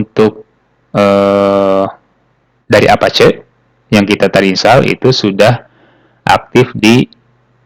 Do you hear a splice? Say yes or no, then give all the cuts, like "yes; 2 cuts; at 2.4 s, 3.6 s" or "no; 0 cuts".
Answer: no; 0 cuts